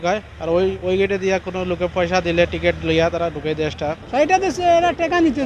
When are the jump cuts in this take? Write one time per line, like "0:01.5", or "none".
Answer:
0:04.0